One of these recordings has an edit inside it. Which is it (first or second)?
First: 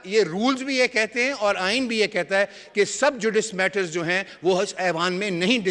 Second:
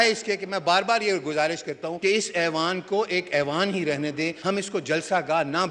second